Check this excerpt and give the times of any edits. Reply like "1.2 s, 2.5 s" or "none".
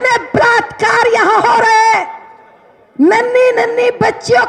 none